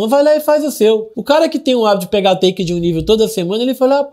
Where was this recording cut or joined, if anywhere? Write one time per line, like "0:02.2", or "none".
0:01.1